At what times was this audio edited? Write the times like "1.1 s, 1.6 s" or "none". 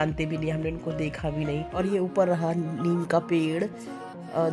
1.7 s